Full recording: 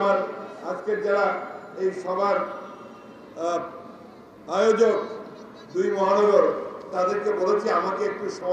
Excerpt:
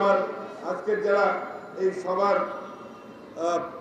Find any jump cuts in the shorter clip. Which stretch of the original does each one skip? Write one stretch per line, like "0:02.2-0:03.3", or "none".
none